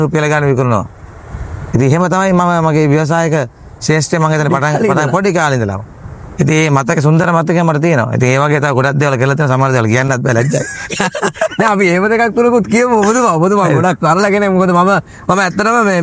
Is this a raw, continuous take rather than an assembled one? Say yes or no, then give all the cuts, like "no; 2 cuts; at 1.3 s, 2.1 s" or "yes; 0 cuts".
yes; 0 cuts